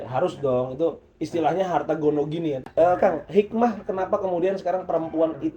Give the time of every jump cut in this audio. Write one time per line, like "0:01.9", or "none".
0:02.6